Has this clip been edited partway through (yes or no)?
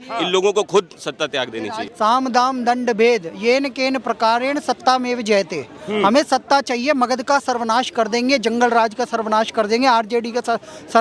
yes